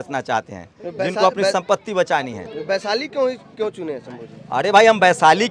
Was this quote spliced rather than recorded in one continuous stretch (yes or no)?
no